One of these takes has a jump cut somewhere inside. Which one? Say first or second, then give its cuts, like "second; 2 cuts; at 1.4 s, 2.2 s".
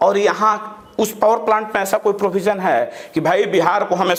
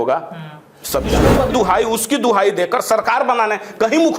second; 1 cut; at 1.5 s